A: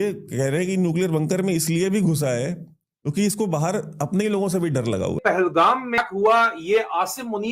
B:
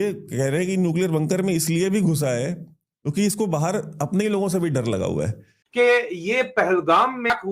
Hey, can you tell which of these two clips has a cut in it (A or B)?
A